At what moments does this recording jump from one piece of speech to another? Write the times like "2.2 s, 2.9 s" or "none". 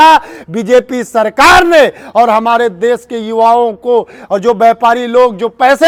none